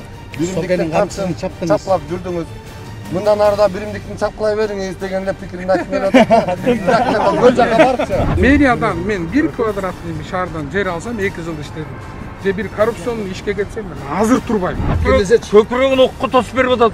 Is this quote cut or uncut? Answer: cut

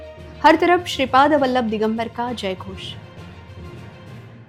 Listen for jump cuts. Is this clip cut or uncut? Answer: uncut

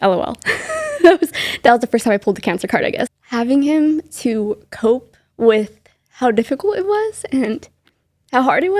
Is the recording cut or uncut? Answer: cut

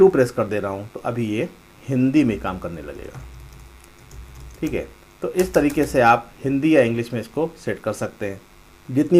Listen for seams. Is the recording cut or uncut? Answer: uncut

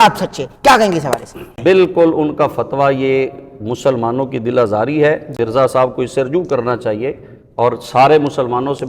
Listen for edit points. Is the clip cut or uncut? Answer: cut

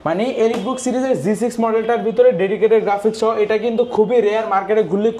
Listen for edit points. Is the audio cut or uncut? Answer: uncut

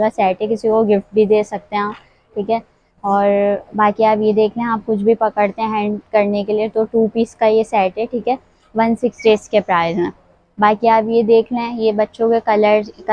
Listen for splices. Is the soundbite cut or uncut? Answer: uncut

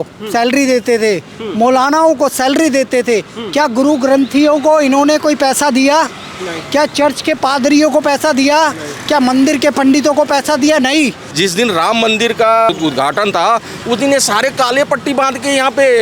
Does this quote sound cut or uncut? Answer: cut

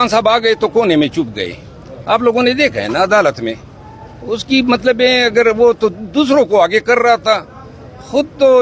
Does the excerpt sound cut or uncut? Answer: uncut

